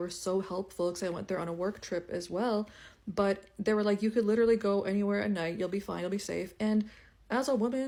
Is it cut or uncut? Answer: uncut